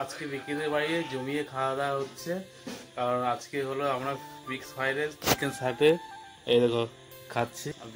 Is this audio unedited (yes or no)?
yes